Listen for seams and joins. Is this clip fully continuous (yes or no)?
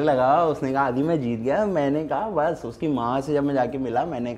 yes